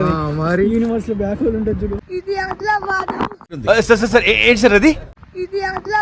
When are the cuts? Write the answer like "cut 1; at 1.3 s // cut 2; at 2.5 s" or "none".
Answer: cut 1; at 2.0 s